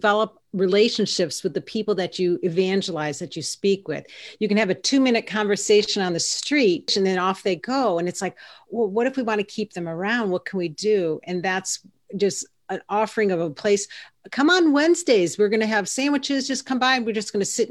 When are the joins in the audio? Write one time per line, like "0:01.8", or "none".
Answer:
0:06.9